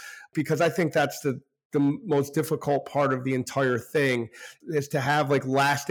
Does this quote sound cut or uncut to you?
cut